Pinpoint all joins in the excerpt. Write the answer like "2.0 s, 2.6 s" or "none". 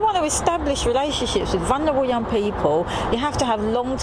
3.1 s